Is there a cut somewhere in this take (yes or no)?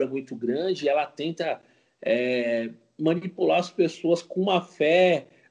no